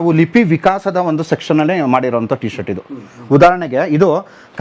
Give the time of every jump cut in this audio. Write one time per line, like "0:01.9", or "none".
none